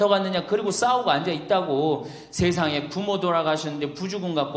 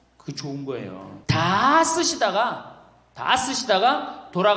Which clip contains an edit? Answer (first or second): second